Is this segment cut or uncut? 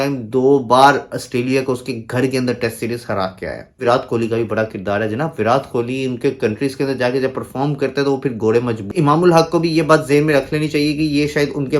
cut